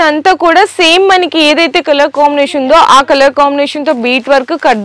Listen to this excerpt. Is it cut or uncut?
uncut